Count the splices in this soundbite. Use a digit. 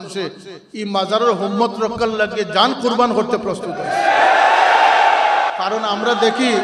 0